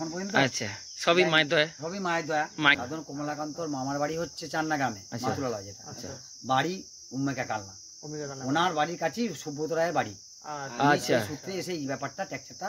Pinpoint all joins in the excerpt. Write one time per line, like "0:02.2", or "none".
0:02.8